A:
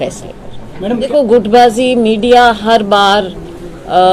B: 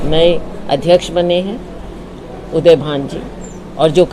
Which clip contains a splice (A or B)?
A